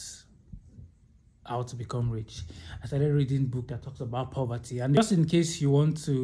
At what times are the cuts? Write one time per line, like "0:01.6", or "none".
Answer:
0:05.0